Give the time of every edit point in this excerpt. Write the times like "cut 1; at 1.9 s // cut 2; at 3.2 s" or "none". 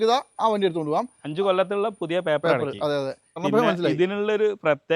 cut 1; at 3.4 s